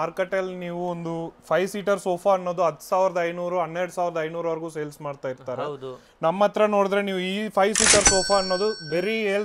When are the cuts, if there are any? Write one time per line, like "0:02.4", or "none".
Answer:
none